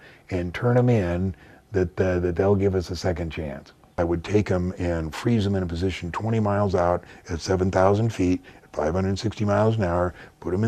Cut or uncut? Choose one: cut